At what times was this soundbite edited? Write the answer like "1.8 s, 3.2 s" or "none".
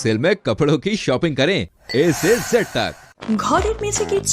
3.1 s